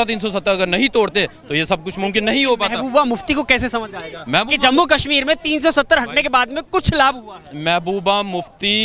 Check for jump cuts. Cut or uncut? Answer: uncut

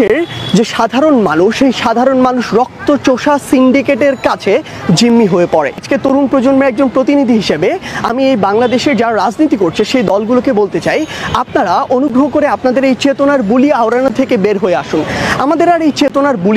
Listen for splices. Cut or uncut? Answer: uncut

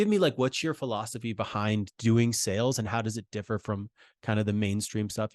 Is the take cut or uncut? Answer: uncut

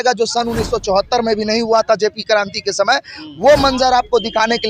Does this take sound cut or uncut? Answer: uncut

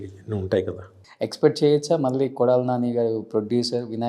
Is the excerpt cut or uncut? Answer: cut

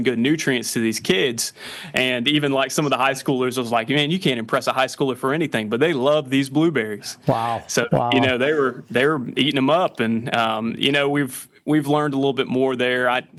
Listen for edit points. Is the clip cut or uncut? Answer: uncut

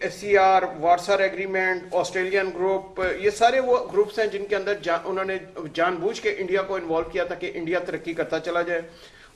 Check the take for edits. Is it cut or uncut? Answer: uncut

